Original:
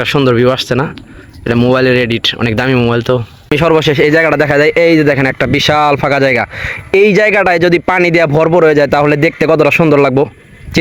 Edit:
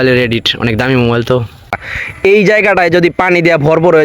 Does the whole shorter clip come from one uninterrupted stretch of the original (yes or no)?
no